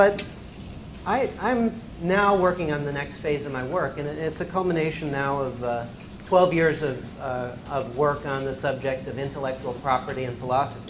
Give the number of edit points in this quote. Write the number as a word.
one